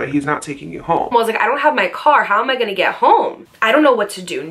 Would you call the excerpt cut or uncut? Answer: cut